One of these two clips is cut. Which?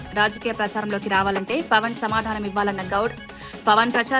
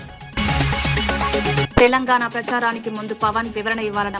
second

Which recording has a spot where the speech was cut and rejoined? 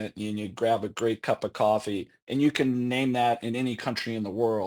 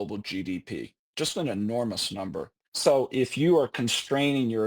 second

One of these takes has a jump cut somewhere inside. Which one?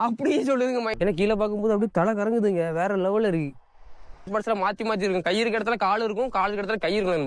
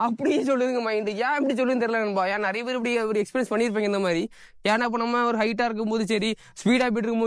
first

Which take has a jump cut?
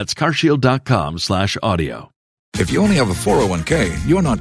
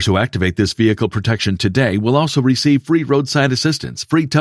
first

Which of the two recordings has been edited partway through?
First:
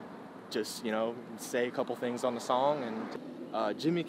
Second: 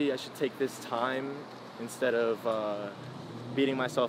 first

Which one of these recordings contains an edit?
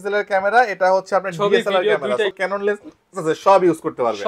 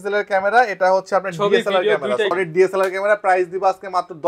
first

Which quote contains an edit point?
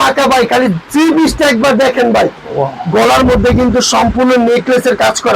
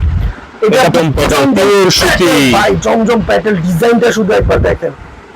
second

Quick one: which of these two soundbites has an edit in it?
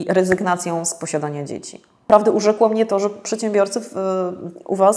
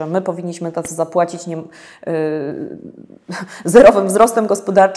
first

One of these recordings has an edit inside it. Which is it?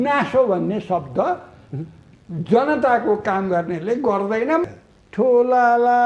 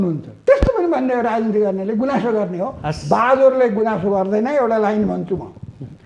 first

